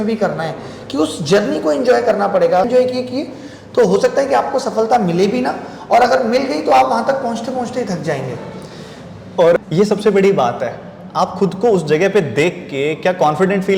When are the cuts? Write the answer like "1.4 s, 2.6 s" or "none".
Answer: 2.6 s, 9.6 s

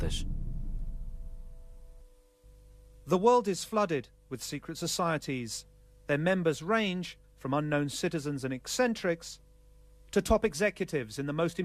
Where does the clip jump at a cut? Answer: 10.1 s

